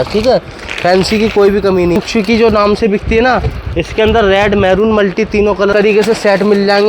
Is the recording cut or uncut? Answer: cut